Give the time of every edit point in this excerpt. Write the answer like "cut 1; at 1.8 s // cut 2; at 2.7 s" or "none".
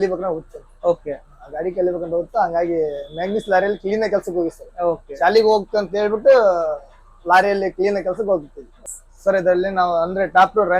cut 1; at 8.7 s